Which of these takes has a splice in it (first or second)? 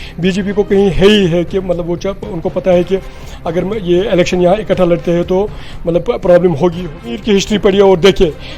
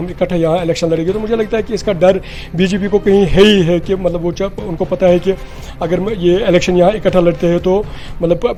first